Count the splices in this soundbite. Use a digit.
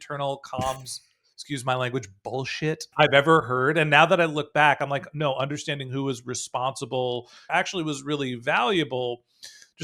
2